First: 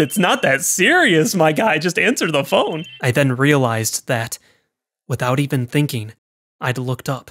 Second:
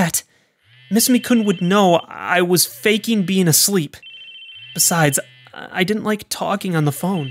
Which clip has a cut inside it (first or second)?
first